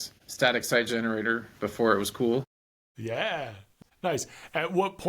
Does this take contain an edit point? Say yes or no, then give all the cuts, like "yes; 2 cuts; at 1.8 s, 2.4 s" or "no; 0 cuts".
yes; 1 cut; at 3.7 s